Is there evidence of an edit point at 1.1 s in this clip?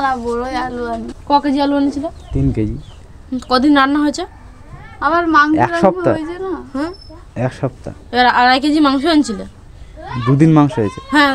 yes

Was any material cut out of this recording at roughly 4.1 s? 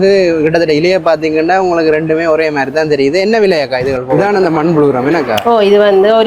yes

